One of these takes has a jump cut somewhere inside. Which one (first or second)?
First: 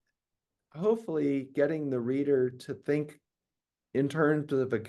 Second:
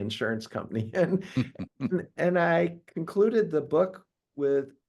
second